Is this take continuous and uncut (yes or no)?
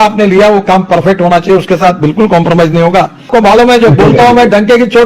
no